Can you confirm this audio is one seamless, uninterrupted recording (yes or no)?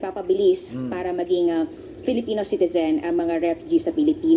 no